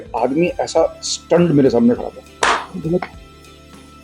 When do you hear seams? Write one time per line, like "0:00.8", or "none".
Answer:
none